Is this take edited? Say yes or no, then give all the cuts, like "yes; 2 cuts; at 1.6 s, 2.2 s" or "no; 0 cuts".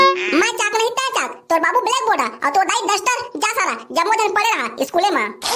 no; 0 cuts